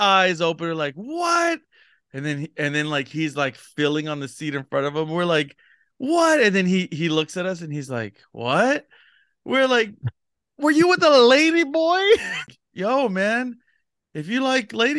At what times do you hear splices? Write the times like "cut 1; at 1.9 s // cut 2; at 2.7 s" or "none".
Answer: cut 1; at 12.5 s